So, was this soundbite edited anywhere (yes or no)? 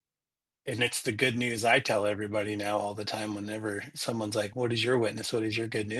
no